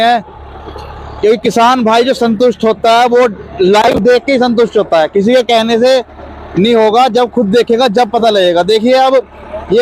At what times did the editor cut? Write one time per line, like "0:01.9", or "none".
none

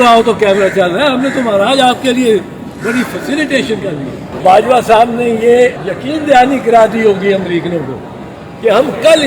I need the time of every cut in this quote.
0:04.4
0:05.9

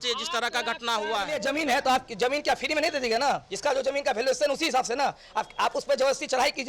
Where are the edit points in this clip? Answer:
0:01.3

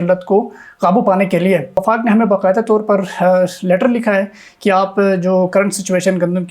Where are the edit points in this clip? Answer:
0:01.8

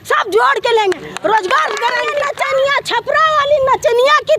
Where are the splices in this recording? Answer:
0:02.1

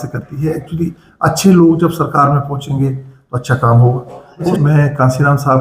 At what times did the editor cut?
0:04.5

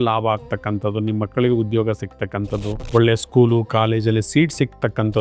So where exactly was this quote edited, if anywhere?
0:02.8

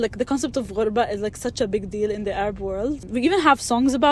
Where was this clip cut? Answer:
none

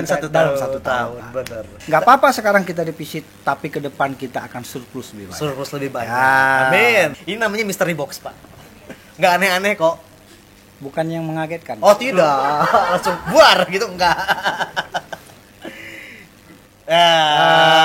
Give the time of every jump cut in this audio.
0:01.7
0:07.1

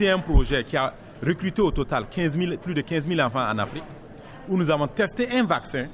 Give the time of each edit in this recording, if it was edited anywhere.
none

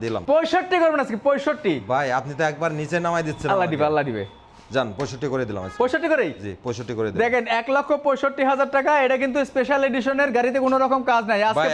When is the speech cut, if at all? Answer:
none

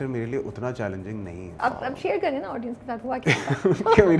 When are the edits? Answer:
0:01.5

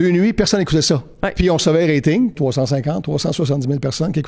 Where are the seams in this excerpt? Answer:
0:02.4

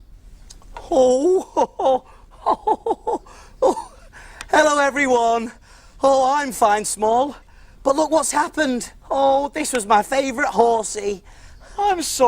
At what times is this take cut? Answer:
0:04.9

